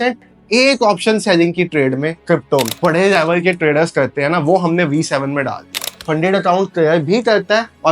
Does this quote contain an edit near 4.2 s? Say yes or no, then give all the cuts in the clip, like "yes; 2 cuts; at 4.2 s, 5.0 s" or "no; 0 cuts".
no; 2 cuts; at 2.7 s, 5.9 s